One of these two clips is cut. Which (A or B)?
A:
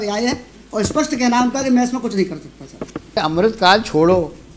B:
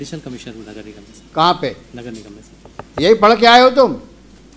A